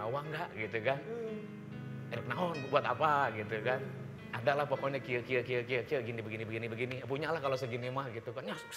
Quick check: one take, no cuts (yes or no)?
yes